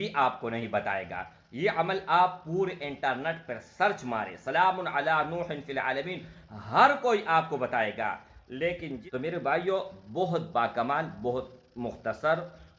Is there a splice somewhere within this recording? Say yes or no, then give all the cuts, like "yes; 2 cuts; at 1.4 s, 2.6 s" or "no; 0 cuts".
yes; 1 cut; at 8.9 s